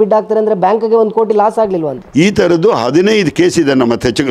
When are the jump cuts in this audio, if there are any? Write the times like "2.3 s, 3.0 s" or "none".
2.0 s